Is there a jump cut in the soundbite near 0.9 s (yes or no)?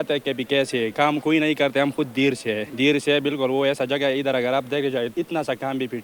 yes